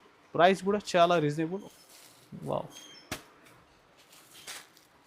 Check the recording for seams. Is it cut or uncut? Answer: cut